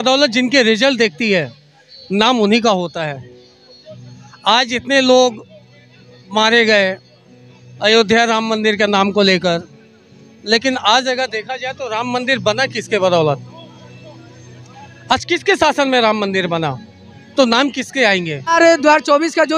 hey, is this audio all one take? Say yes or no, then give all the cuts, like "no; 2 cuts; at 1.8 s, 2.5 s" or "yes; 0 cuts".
yes; 0 cuts